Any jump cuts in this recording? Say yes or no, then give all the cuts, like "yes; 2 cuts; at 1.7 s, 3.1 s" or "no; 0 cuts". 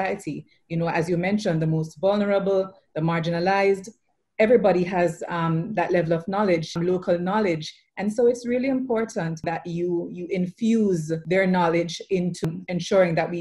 yes; 4 cuts; at 6.7 s, 9.4 s, 11.1 s, 12.4 s